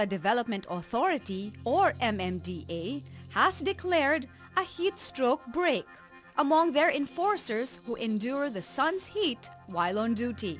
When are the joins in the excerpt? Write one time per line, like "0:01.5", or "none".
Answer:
0:09.5